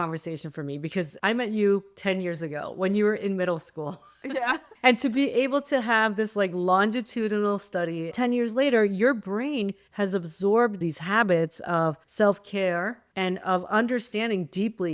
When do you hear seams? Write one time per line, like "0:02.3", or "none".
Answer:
0:08.1